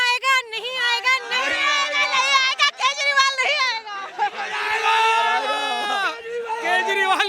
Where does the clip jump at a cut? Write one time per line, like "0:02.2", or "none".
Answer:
none